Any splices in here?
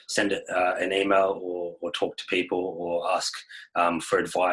no; 0 cuts

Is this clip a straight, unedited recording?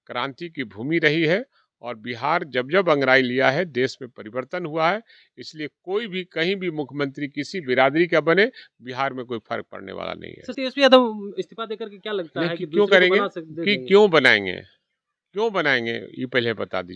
no; 1 cut; at 10.5 s

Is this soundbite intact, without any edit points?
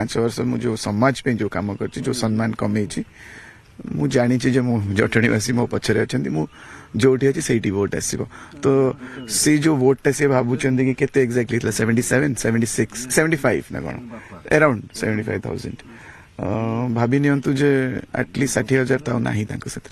no; 1 cut; at 2.6 s

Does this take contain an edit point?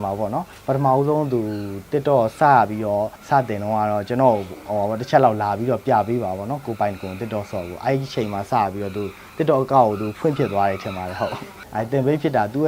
yes; 2 cuts; at 3.2 s, 11.5 s

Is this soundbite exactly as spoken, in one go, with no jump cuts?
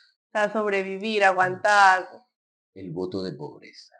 yes; 0 cuts

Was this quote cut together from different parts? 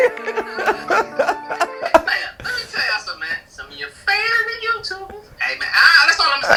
no; 0 cuts

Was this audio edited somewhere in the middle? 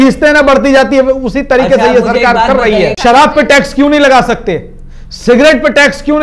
yes; 1 cut; at 2.9 s

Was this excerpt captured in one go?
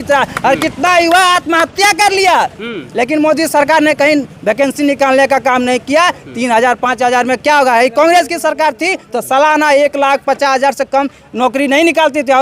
yes; 0 cuts

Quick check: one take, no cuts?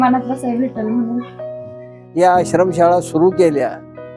no; 1 cut; at 1.6 s

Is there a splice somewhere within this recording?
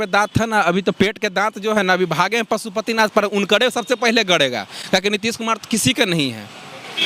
no; 0 cuts

